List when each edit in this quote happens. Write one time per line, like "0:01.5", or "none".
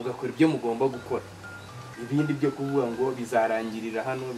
none